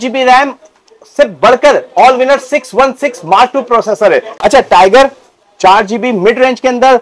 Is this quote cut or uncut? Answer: cut